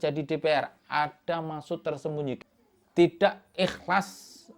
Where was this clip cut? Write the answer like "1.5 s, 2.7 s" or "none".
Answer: 2.4 s